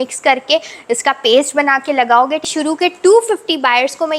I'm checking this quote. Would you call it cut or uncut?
cut